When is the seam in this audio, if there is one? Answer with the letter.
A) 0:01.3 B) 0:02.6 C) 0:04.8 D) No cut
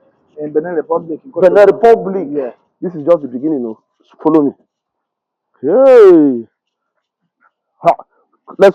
B